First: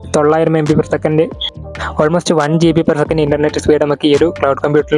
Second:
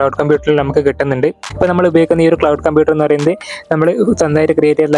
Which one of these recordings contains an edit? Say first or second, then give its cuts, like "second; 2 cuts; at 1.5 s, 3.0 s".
second; 1 cut; at 1.4 s